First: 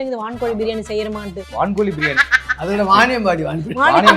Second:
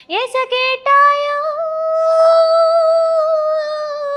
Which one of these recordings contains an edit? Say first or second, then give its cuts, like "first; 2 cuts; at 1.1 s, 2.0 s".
first; 1 cut; at 1.4 s